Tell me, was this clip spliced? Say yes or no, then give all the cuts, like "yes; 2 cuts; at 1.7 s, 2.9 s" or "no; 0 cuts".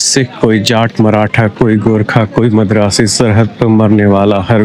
no; 0 cuts